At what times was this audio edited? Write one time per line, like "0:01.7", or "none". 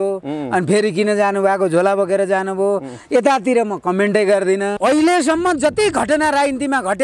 0:04.8